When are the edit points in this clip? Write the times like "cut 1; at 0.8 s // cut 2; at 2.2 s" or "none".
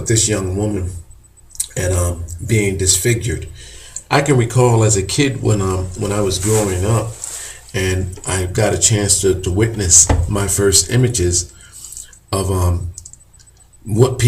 cut 1; at 3.2 s